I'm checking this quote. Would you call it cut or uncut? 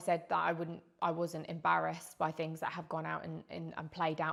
uncut